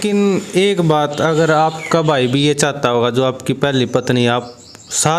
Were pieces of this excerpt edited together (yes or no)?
no